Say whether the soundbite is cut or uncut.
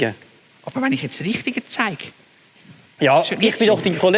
uncut